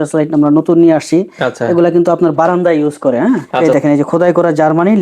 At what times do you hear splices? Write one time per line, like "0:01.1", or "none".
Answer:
0:03.5